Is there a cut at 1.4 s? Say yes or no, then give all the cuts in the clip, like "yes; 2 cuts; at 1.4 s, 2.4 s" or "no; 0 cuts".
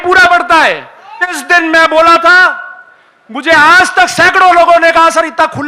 yes; 1 cut; at 1.4 s